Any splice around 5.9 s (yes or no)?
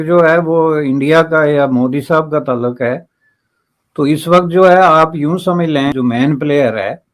yes